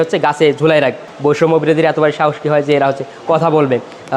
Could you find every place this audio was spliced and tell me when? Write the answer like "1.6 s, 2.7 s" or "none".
1.1 s